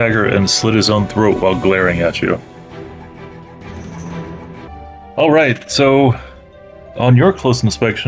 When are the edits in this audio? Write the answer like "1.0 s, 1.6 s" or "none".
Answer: 4.7 s